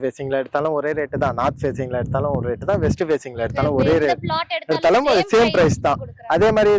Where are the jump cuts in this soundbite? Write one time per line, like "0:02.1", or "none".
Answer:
none